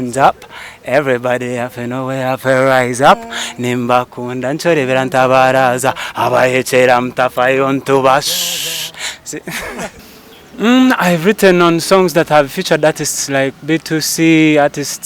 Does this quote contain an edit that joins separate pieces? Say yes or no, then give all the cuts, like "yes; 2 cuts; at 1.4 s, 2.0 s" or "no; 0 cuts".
yes; 1 cut; at 10.0 s